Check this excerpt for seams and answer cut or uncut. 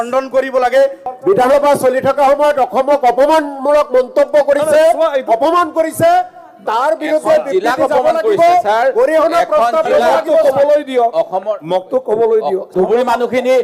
cut